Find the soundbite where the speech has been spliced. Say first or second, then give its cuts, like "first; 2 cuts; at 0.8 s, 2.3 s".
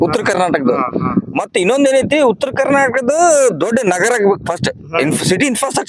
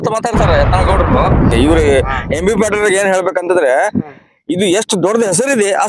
second; 1 cut; at 1.5 s